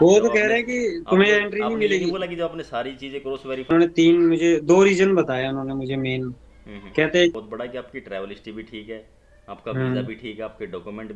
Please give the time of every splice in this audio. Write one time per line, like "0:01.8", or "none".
0:03.7
0:07.3